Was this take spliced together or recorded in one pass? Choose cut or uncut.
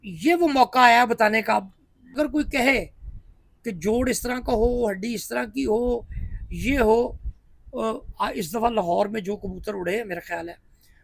cut